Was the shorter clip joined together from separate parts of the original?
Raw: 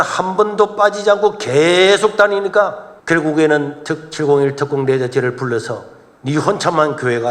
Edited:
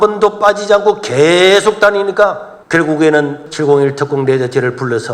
yes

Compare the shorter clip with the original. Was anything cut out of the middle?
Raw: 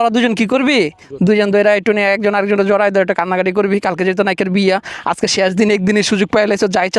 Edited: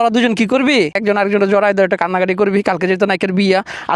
yes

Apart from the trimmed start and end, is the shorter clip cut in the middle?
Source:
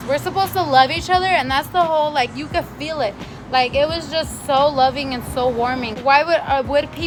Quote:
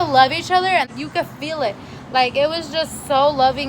yes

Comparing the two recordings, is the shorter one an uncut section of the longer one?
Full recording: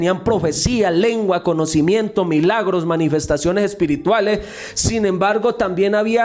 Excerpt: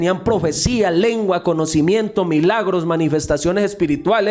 yes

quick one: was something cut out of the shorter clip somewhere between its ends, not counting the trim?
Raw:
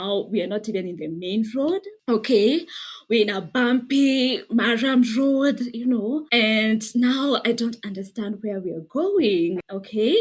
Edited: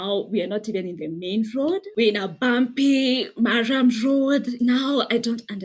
yes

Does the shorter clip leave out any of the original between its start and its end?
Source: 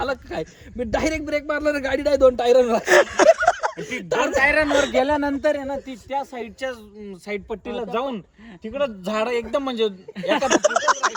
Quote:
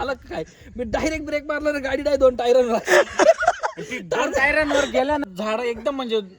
yes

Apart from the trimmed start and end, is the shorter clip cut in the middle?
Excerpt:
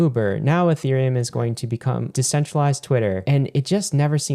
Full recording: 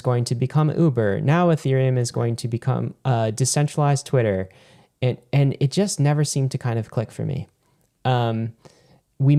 yes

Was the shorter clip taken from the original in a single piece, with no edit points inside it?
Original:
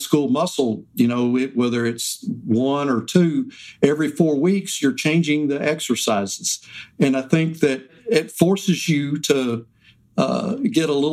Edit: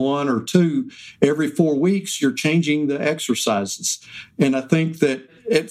yes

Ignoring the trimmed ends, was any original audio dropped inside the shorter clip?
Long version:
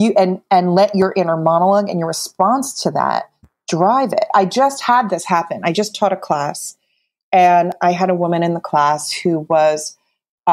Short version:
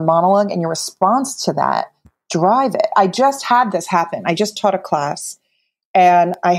no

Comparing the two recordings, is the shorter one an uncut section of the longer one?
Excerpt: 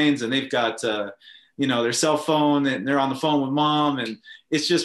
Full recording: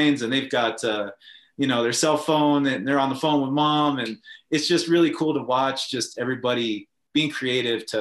yes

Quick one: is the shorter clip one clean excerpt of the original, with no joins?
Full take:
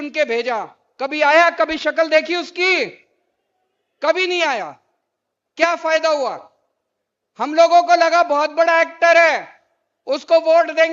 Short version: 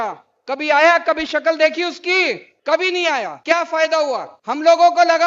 no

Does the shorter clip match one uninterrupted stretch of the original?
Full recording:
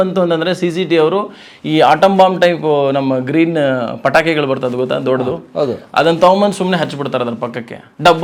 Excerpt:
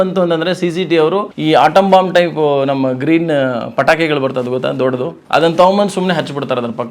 no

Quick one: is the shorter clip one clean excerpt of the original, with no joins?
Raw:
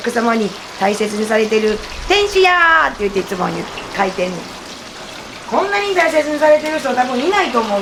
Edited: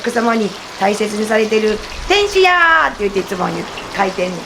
yes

